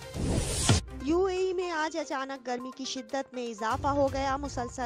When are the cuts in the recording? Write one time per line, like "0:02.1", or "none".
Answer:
0:00.9